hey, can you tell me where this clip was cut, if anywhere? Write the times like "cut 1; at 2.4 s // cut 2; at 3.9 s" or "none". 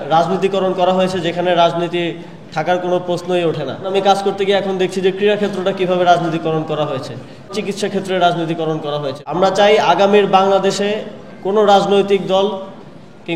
cut 1; at 3.9 s // cut 2; at 7.5 s // cut 3; at 9.1 s